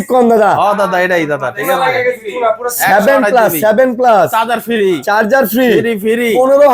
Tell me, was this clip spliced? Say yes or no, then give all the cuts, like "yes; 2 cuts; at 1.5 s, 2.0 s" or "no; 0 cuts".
no; 0 cuts